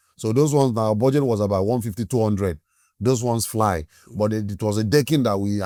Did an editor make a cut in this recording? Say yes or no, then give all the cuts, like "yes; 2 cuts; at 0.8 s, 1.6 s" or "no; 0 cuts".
no; 0 cuts